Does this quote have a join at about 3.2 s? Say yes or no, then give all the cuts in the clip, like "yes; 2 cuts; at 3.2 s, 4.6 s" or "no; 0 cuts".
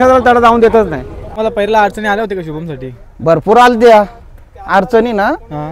no; 1 cut; at 1.3 s